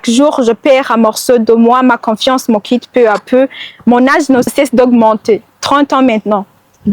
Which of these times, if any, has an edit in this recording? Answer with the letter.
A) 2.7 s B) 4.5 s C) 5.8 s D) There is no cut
B